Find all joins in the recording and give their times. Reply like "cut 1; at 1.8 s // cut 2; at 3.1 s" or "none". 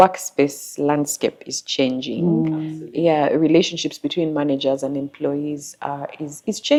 none